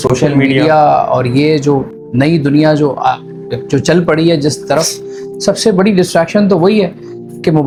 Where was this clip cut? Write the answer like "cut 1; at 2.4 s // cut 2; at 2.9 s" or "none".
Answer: none